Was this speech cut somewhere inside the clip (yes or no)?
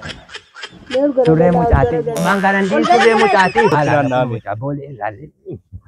yes